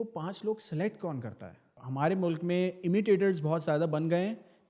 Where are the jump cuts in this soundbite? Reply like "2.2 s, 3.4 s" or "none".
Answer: 1.8 s